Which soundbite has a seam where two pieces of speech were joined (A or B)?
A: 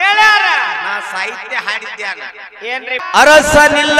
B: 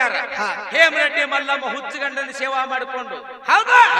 A